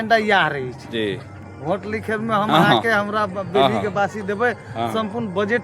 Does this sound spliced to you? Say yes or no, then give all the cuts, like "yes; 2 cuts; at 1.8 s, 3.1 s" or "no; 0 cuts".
no; 0 cuts